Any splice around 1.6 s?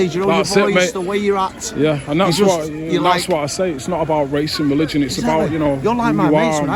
no; 0 cuts

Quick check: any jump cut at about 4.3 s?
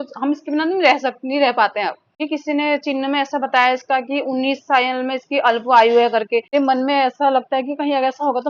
no; 2 cuts; at 2.2 s, 6.5 s

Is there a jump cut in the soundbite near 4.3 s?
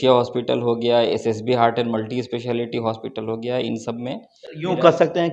no; 0 cuts

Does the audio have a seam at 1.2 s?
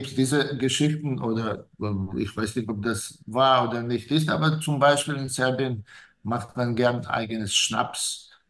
no; 0 cuts

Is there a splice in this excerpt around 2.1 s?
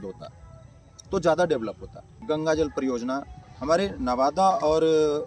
yes; 1 cut; at 2.1 s

